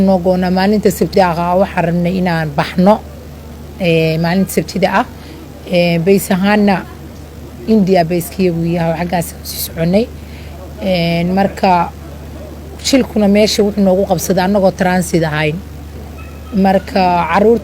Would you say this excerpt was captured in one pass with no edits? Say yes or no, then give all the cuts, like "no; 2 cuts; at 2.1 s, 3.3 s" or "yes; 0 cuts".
no; 1 cut; at 1.0 s